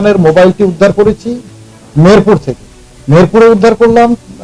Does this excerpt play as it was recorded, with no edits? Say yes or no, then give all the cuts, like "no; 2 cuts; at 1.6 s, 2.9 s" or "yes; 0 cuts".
no; 1 cut; at 2.6 s